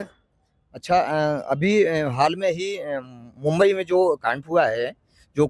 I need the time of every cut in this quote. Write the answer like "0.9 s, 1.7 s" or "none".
none